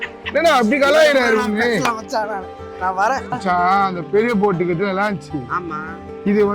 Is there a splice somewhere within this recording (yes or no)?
yes